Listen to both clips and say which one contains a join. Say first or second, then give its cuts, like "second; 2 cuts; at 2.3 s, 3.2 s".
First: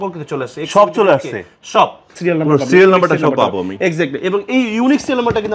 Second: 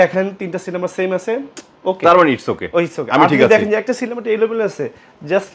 first; 1 cut; at 2.1 s